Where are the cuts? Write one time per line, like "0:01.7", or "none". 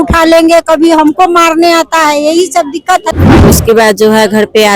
0:03.5